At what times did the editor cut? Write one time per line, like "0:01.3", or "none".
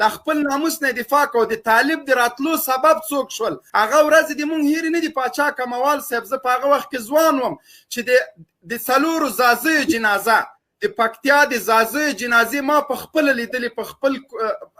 0:03.6